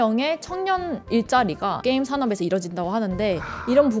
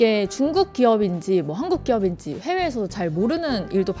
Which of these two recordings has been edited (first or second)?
first